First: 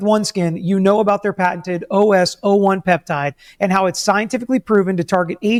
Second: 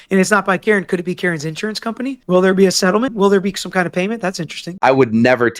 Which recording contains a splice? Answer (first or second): second